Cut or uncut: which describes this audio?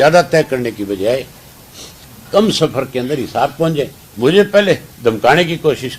cut